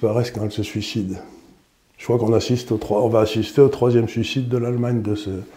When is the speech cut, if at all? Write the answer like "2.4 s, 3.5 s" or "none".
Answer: none